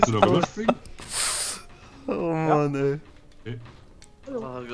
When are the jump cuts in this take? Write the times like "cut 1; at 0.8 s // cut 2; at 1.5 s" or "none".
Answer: none